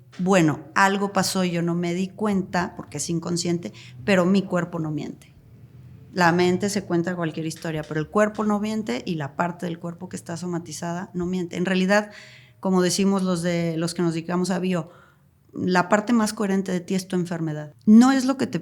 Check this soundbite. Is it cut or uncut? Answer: cut